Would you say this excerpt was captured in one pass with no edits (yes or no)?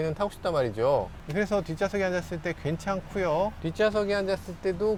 yes